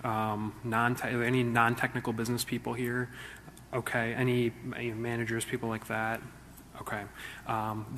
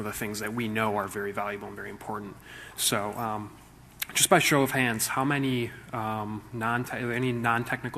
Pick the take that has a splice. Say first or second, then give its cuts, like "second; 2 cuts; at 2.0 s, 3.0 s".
first; 1 cut; at 4.4 s